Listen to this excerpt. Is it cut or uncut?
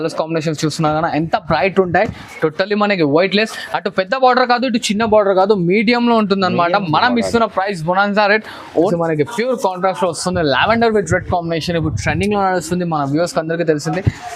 cut